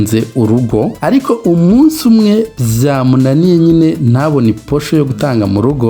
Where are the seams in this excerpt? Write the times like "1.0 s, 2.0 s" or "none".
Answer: 1.0 s